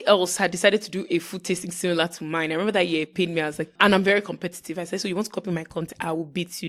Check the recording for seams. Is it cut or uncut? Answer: cut